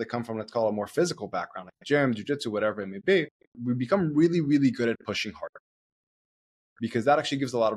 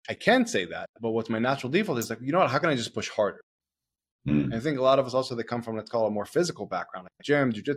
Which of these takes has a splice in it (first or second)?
first